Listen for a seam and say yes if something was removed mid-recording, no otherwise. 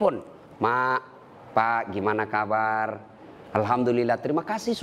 no